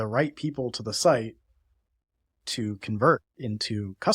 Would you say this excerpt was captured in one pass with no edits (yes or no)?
yes